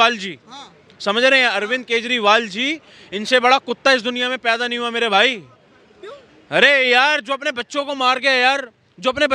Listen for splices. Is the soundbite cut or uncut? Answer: uncut